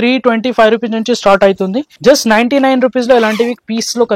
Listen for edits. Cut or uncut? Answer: cut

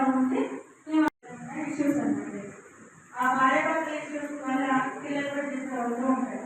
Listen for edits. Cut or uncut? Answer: cut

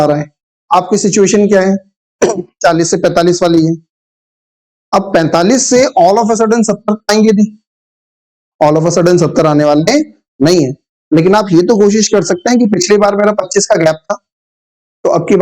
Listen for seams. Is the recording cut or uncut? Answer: uncut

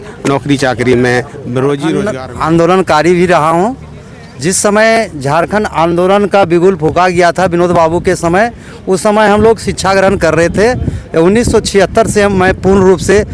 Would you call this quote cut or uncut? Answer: cut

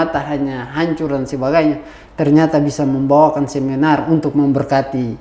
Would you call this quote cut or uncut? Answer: uncut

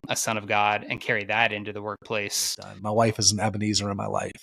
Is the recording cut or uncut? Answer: cut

